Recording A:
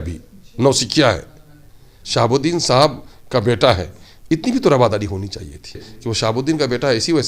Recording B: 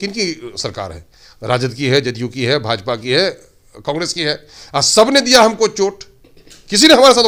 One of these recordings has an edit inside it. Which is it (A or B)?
A